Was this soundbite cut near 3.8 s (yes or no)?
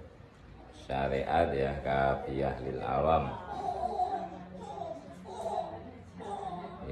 no